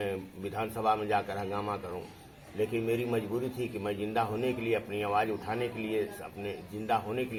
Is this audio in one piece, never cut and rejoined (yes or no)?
yes